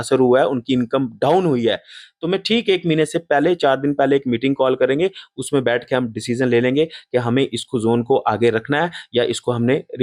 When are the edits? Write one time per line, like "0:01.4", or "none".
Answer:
none